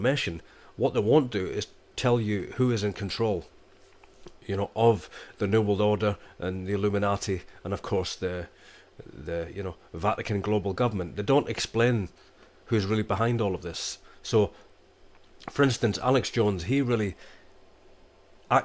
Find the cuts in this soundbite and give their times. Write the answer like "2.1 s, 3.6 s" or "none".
none